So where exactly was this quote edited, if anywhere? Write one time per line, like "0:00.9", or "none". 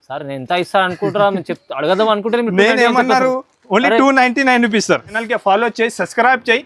0:05.2